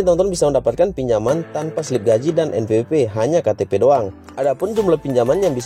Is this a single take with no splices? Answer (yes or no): no